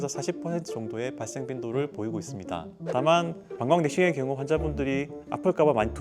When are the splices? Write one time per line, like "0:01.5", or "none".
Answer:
0:02.8